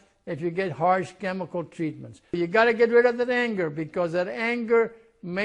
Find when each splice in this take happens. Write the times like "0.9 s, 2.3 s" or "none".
2.3 s